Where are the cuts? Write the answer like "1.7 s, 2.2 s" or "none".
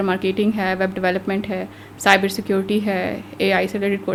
none